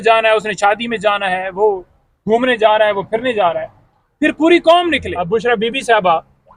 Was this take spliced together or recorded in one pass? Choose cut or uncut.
cut